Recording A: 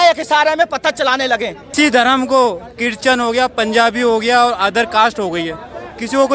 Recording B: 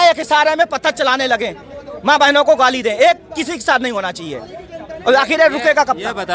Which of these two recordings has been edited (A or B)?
A